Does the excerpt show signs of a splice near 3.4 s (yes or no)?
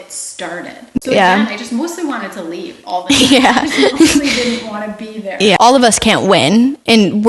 no